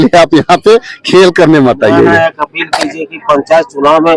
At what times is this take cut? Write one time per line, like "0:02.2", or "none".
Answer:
none